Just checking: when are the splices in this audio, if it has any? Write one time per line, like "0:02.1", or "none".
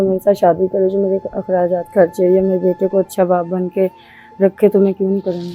none

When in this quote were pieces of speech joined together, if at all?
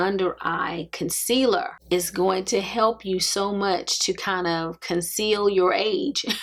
none

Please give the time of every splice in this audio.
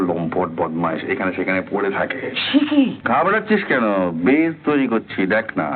0:03.0

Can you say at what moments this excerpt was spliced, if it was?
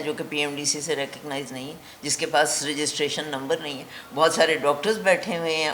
none

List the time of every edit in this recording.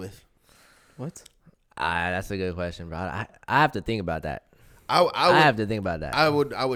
none

